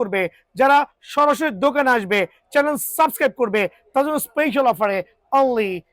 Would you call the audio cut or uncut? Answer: uncut